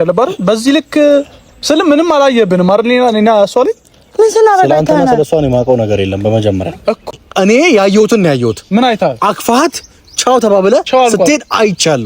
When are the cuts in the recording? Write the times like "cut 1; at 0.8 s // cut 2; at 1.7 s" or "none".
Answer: cut 1; at 7.1 s